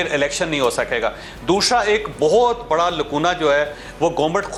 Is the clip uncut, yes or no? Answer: yes